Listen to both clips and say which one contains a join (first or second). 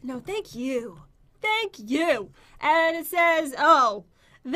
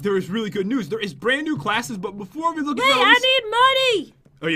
first